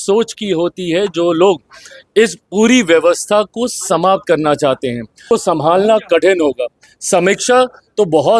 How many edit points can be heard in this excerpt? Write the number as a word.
one